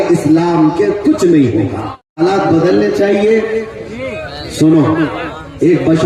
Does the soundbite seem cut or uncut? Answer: cut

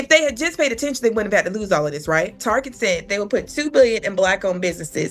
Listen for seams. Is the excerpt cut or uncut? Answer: cut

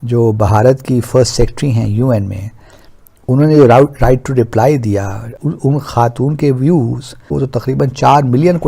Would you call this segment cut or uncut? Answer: cut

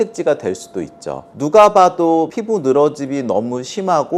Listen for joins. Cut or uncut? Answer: cut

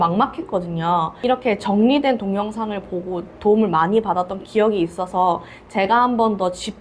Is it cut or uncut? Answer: cut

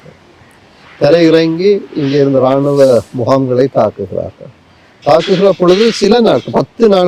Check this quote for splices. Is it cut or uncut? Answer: uncut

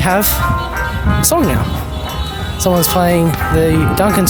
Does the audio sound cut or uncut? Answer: uncut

